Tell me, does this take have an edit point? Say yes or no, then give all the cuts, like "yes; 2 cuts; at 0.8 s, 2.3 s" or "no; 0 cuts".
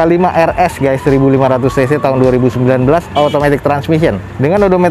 no; 0 cuts